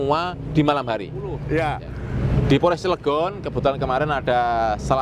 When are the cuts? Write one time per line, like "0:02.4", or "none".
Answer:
0:01.4